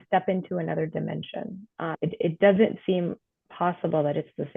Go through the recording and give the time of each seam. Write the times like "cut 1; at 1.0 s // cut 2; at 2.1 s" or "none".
cut 1; at 1.9 s